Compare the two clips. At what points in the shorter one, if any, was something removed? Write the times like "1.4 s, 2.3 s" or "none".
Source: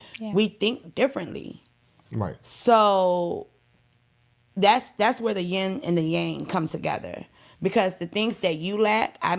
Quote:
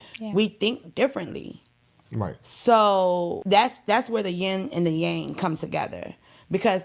3.4 s